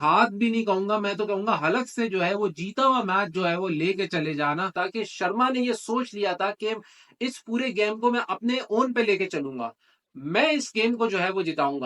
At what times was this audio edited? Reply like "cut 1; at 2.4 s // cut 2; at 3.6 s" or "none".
cut 1; at 4.7 s